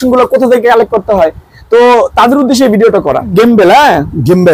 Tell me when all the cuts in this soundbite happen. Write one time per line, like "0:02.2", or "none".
0:03.3